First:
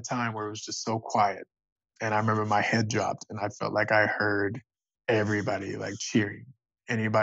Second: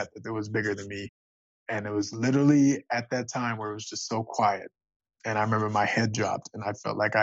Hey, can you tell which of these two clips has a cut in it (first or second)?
second